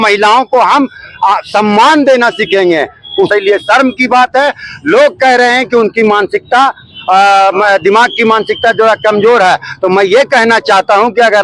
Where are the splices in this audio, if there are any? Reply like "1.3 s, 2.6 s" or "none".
3.3 s